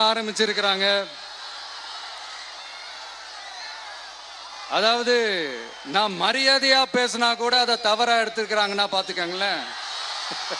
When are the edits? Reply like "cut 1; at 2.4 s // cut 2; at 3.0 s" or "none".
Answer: none

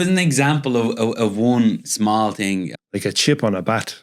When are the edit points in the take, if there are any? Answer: cut 1; at 2.7 s

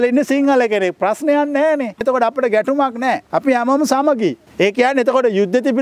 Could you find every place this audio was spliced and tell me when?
cut 1; at 2.0 s // cut 2; at 3.2 s // cut 3; at 4.4 s

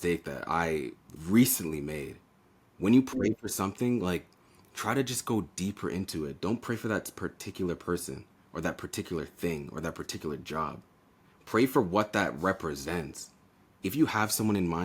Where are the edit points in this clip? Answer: cut 1; at 1.1 s

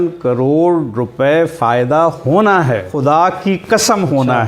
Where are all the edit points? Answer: cut 1; at 2.9 s

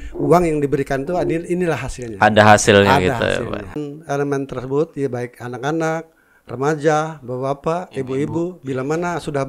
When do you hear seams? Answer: cut 1; at 3.8 s

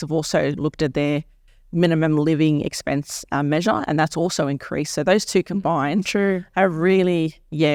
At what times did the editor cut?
none

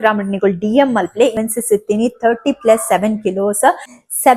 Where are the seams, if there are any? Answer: cut 1; at 1.3 s

